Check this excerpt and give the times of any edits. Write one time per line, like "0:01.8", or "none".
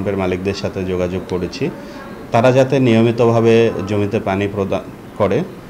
none